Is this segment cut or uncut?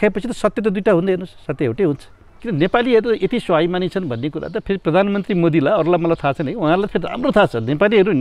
cut